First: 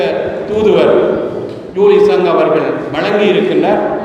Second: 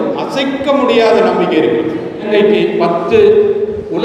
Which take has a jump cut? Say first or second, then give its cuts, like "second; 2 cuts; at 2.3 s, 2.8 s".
second; 1 cut; at 2.3 s